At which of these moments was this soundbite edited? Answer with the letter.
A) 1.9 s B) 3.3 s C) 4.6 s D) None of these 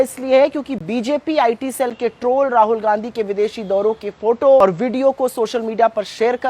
C